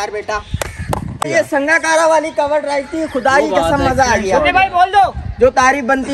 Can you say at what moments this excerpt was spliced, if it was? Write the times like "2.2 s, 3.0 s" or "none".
1.3 s